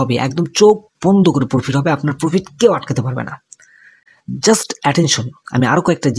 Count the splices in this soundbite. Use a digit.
0